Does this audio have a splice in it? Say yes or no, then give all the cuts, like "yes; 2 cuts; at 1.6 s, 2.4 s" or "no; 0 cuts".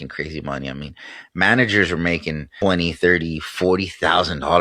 yes; 1 cut; at 2.4 s